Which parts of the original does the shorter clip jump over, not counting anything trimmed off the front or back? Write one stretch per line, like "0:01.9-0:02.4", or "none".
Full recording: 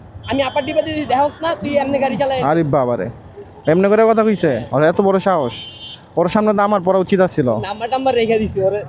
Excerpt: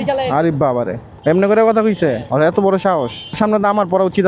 0:03.2-0:03.5
0:05.8-0:06.3